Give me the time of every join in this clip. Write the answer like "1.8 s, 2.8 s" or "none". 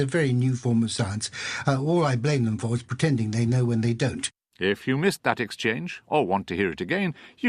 4.1 s